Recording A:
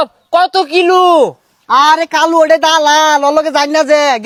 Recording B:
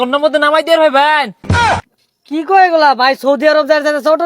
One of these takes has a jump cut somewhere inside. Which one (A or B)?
B